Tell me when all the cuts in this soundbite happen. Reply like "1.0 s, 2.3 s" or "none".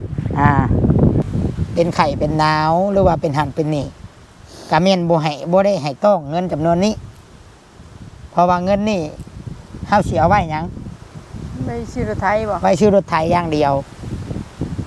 1.2 s